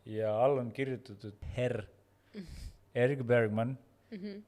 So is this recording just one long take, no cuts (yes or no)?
no